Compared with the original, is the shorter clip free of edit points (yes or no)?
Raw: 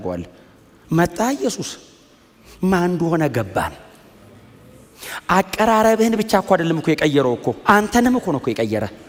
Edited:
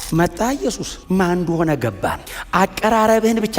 no